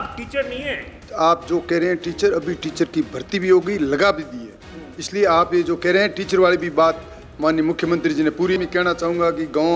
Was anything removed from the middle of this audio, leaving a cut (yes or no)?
yes